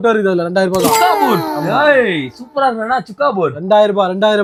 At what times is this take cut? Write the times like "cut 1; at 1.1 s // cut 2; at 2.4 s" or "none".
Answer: none